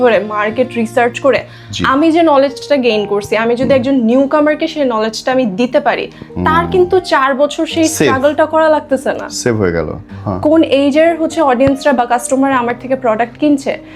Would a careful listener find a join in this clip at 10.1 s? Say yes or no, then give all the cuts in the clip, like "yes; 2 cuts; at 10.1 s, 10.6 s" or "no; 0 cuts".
yes; 1 cut; at 10.1 s